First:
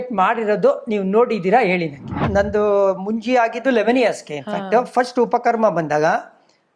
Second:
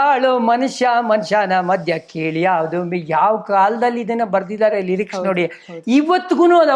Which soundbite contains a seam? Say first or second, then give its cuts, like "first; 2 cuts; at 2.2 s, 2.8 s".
first; 1 cut; at 2.2 s